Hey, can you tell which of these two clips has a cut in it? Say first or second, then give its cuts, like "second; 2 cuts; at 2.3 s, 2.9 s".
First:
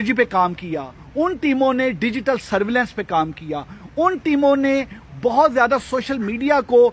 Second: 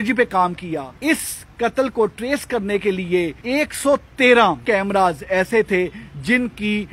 second; 3 cuts; at 0.9 s, 3.4 s, 4.6 s